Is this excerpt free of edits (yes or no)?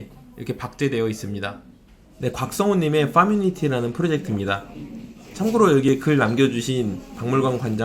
no